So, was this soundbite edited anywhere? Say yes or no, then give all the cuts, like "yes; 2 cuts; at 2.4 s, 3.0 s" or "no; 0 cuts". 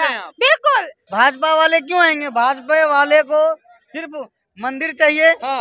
yes; 1 cut; at 1.0 s